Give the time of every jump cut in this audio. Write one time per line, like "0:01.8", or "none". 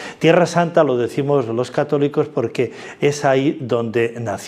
none